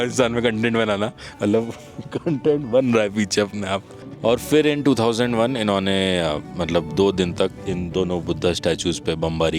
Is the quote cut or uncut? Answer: cut